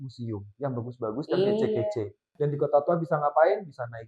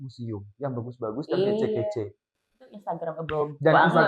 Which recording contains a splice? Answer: first; 1 cut; at 2.2 s

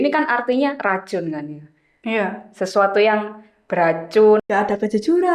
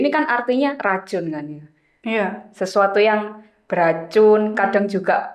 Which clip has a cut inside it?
first; 1 cut; at 4.4 s

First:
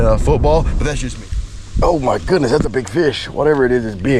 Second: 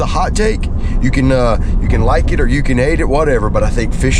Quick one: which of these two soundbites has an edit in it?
first; 1 cut; at 1.0 s

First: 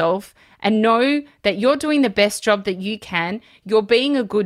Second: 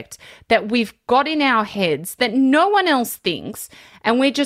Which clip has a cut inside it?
first; 1 cut; at 3.6 s

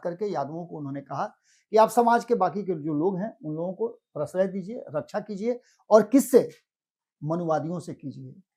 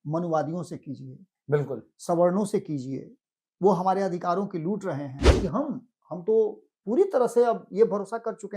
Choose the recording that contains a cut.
second; 1 cut; at 5.2 s

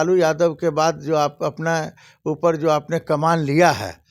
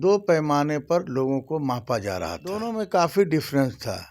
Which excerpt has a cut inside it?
second; 1 cut; at 2.6 s

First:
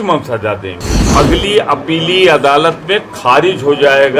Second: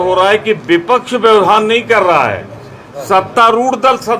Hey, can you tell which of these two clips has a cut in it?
first; 1 cut; at 1.0 s

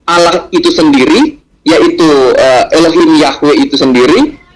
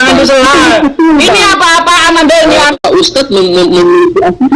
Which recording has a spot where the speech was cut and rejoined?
second; 1 cut; at 2.7 s

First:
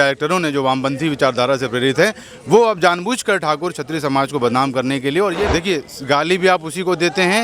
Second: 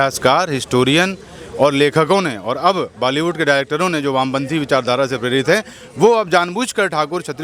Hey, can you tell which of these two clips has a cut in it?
first; 1 cut; at 5.5 s

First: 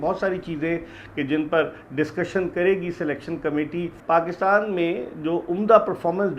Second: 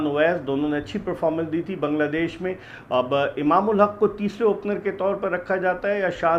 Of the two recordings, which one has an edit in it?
first; 1 cut; at 3.9 s

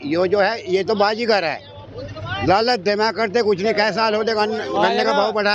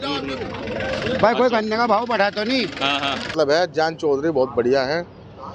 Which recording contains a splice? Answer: second; 1 cut; at 3.3 s

